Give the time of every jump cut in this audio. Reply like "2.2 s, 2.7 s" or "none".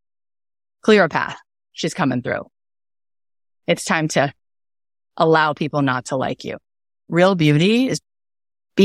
7.1 s